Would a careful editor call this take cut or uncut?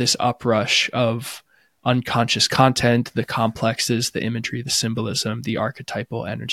uncut